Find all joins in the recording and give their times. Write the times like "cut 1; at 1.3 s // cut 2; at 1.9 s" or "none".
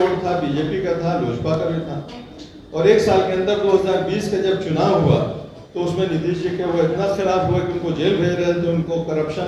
none